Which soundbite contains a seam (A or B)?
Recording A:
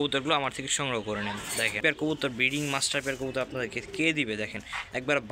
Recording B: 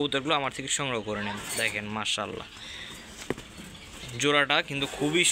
A